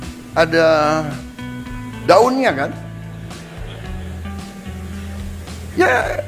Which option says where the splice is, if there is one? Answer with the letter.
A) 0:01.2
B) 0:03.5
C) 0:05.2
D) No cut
D